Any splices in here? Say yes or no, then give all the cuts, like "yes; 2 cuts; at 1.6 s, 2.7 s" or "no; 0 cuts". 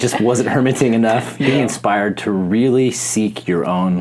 yes; 1 cut; at 1.3 s